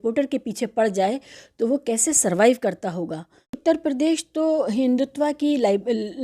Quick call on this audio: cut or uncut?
cut